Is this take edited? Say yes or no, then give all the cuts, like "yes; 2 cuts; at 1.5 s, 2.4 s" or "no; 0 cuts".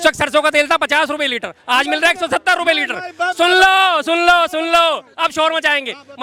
no; 0 cuts